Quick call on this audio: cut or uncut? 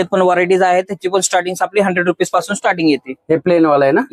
uncut